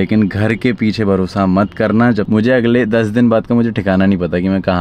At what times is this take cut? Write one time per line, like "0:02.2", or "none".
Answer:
0:02.3